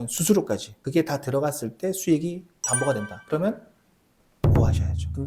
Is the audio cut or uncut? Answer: uncut